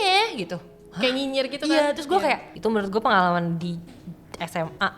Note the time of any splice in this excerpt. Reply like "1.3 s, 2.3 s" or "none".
2.5 s

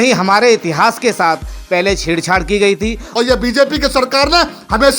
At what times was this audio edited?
3.0 s

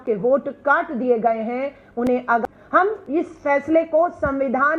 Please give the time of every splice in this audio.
2.4 s

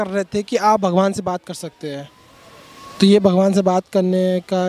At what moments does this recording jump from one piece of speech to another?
none

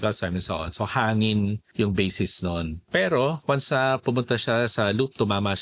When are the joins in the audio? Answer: 1.6 s, 2.9 s

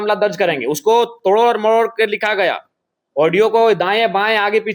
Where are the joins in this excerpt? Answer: none

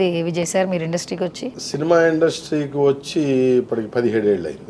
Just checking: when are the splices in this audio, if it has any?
1.5 s

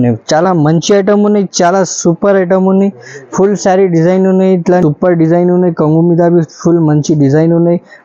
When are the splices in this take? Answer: 4.8 s

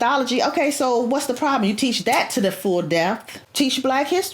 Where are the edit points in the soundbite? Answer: 3.4 s

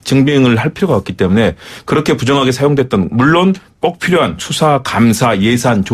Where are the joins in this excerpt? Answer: none

